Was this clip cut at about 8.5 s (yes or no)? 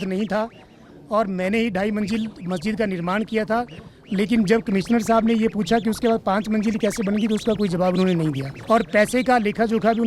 yes